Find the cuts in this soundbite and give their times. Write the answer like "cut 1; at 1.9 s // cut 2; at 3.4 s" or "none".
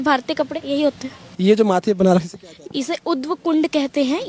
cut 1; at 0.9 s